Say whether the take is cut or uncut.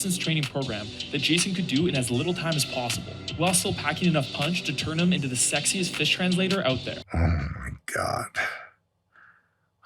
cut